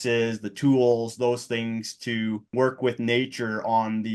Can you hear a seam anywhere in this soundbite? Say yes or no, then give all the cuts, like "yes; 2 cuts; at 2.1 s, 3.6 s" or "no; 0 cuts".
yes; 1 cut; at 2.5 s